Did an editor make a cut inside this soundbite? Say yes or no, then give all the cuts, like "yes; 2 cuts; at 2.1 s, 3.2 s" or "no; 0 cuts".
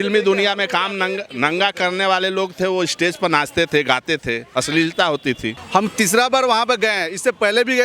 yes; 1 cut; at 5.5 s